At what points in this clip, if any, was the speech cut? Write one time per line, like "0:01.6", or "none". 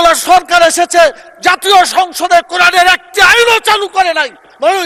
none

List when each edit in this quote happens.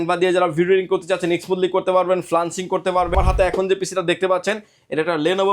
0:03.1

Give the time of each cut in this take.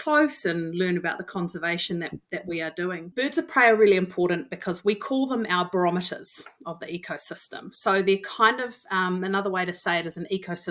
0:03.1

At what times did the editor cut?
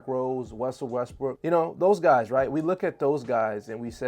0:01.4

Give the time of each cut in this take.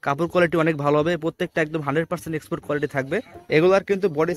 0:03.4

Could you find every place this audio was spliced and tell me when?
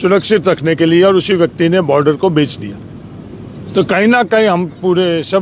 none

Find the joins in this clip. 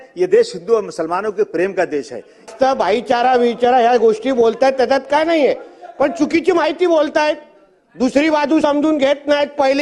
0:02.5

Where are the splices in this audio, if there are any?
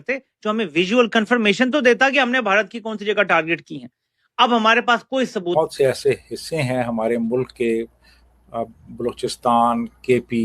0:05.5

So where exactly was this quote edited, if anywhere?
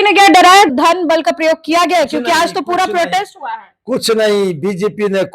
none

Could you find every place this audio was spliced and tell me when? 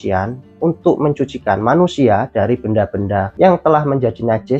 0:03.3

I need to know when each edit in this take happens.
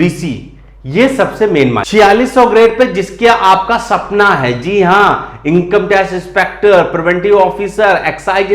0:01.9

